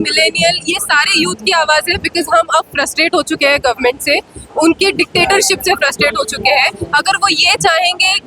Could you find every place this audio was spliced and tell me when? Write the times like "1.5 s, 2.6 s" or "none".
none

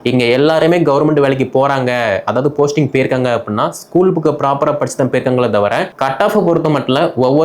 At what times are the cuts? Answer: 5.9 s

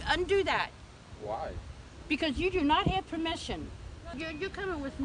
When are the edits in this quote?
4.1 s

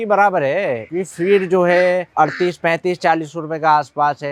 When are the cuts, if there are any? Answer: none

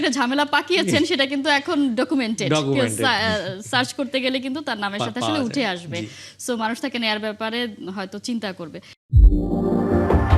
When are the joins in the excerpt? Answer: none

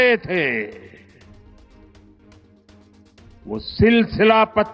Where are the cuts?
1.0 s, 3.3 s

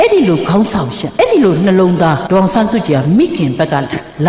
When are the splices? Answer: 1.0 s, 2.2 s

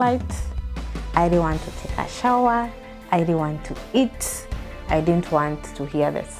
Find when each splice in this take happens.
4.8 s

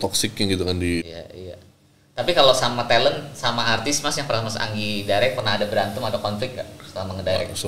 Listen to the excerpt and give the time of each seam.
1.1 s

